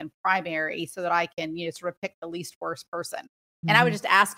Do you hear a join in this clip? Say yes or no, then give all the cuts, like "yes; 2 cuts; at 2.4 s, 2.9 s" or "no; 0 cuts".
yes; 1 cut; at 3.4 s